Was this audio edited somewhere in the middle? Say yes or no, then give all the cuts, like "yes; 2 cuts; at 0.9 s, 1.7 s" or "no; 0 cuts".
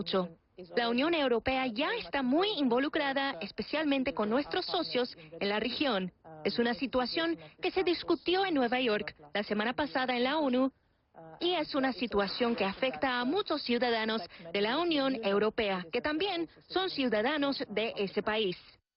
yes; 1 cut; at 11.7 s